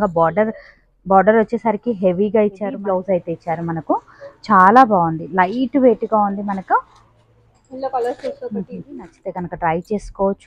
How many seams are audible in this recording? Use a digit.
2